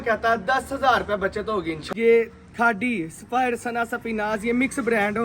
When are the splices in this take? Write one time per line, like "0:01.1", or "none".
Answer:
0:01.8